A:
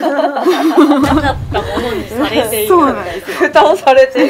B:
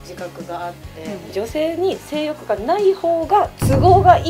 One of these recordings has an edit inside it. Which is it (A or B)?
B